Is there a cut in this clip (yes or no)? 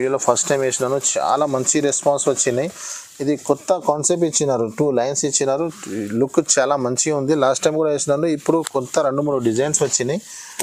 no